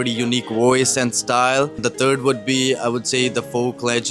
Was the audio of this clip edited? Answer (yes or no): yes